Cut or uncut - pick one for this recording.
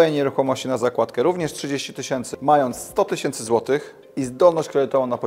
cut